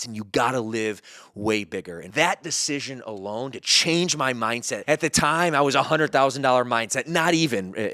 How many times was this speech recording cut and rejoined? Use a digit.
2